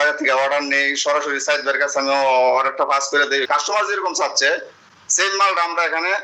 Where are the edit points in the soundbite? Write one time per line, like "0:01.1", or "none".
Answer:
0:03.4